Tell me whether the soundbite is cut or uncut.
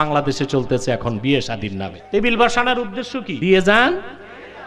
cut